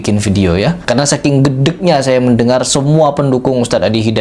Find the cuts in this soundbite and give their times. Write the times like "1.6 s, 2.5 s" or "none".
none

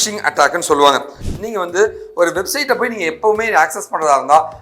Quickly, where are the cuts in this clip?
1.2 s

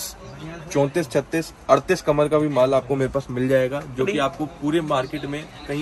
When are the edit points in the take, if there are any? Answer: none

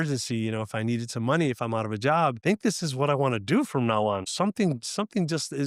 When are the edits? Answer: 2.4 s, 4.3 s

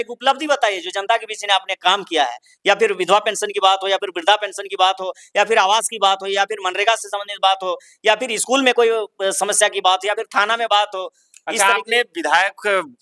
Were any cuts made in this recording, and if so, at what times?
none

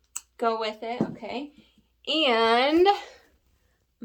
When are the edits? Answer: none

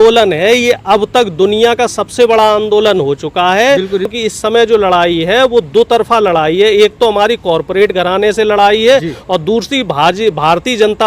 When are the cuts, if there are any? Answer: 4.1 s

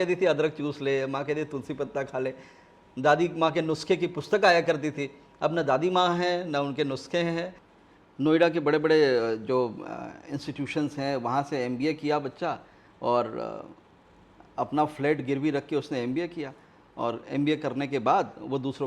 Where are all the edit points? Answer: 7.6 s

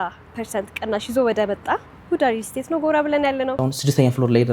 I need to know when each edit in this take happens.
3.6 s

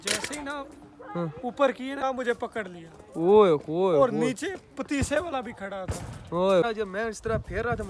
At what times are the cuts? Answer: 2.0 s, 6.6 s

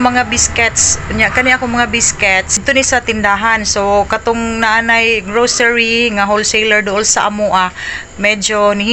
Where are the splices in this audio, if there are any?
2.6 s

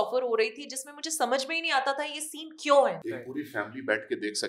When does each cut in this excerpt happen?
3.1 s

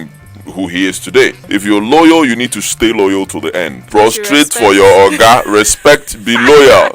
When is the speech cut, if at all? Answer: 1.4 s, 3.8 s

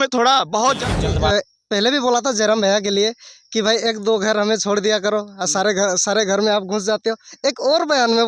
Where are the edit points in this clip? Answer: 1.1 s

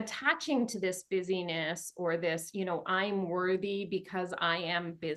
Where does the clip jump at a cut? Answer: none

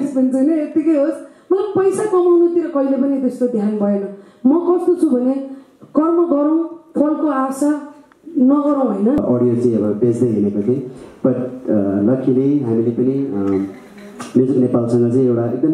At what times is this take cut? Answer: 9.2 s

